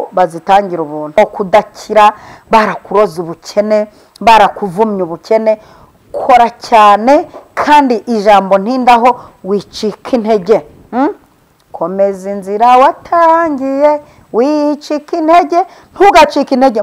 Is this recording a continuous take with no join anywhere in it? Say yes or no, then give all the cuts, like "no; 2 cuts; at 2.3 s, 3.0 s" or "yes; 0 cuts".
no; 1 cut; at 1.2 s